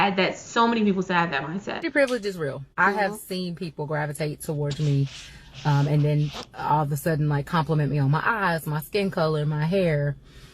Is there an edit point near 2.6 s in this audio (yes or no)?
yes